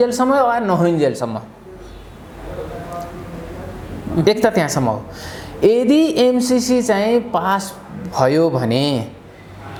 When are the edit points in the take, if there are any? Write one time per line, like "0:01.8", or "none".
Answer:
none